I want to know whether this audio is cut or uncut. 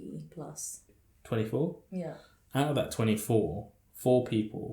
cut